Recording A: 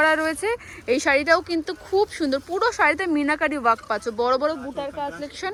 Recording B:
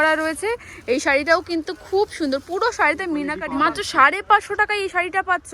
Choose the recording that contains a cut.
B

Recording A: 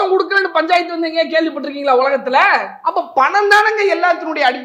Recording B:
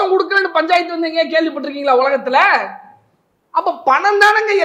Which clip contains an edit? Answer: A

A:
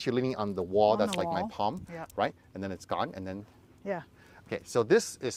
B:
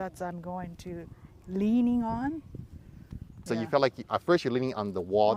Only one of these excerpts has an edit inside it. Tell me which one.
B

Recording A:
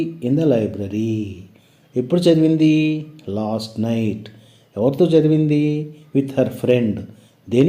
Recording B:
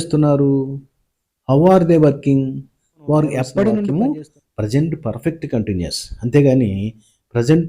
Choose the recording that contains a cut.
B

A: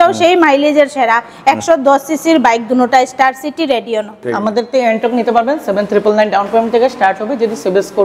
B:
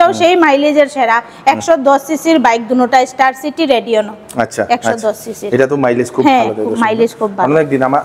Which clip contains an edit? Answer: A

